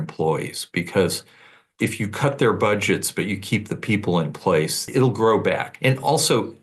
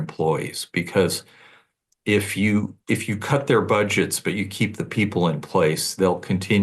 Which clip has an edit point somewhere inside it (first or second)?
first